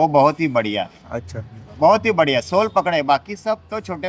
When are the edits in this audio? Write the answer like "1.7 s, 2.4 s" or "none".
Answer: none